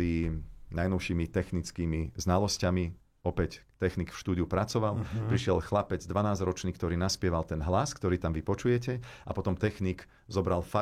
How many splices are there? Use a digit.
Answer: 0